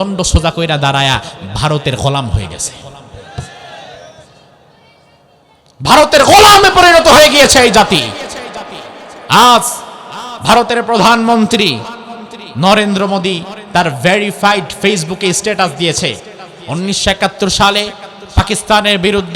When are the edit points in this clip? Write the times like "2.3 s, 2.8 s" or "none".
none